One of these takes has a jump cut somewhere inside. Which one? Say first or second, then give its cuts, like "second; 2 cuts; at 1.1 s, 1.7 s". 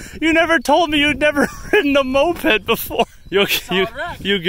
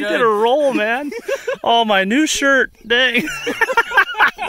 first; 1 cut; at 3.1 s